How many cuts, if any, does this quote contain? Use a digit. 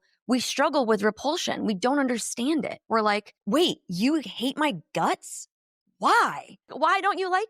2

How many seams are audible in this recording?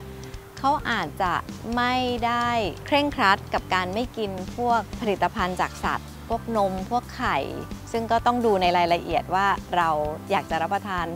3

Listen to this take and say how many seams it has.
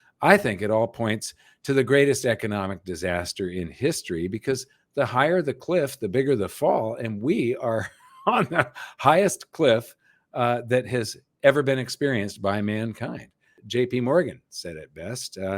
1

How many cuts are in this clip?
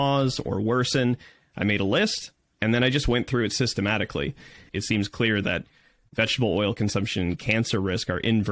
1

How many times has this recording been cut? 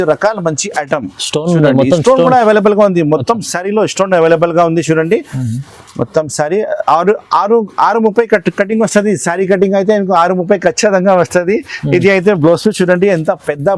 0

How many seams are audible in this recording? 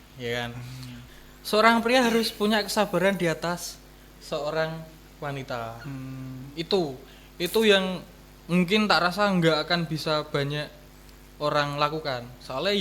1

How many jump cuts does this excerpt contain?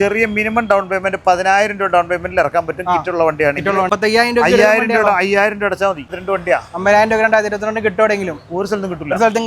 2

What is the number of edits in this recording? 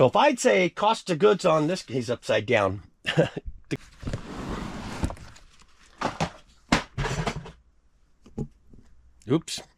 1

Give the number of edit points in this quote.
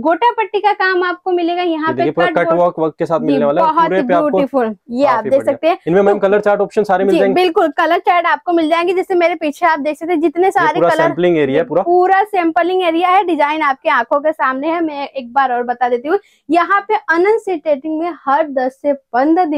0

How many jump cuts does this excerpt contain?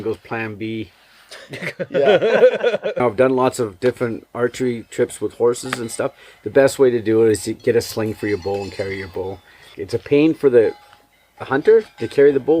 2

